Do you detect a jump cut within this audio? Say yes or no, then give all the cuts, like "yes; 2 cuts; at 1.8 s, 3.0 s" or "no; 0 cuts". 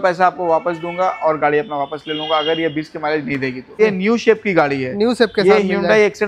yes; 1 cut; at 3.8 s